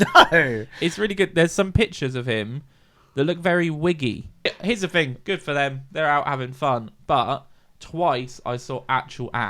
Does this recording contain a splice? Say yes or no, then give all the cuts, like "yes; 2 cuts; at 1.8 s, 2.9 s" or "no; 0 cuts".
yes; 1 cut; at 4.6 s